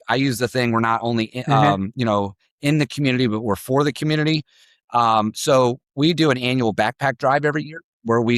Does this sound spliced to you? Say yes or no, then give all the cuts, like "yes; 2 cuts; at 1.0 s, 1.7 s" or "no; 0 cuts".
no; 0 cuts